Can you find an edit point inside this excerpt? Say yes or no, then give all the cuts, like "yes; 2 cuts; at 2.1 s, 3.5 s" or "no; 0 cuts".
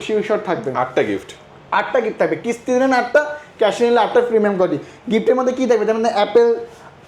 no; 0 cuts